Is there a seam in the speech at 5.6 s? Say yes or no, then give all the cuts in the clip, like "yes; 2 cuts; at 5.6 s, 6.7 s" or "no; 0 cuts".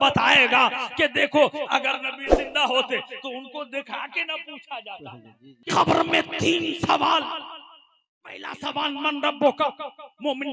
yes; 1 cut; at 5.6 s